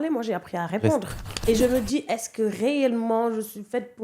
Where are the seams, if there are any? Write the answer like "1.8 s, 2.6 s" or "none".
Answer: 1.4 s